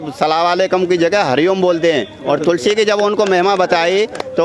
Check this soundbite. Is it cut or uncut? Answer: uncut